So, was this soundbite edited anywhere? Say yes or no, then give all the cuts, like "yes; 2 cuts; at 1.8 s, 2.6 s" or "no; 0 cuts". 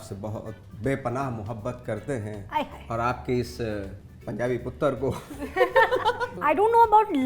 yes; 1 cut; at 6.3 s